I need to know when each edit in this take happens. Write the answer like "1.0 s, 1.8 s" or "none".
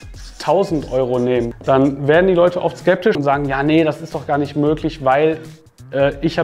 1.5 s, 3.2 s